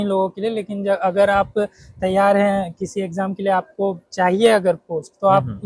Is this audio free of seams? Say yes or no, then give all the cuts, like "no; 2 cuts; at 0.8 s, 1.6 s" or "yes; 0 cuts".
yes; 0 cuts